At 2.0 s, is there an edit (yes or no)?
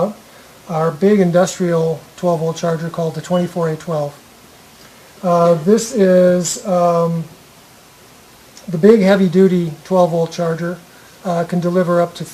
no